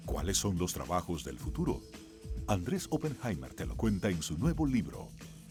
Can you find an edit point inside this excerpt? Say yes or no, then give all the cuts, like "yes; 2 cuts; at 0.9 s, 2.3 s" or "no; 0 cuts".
no; 0 cuts